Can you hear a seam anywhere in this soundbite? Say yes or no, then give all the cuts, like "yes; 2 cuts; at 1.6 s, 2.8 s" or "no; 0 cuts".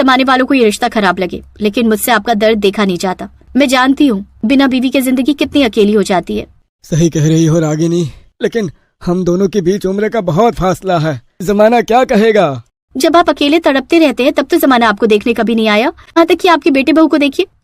yes; 1 cut; at 16.2 s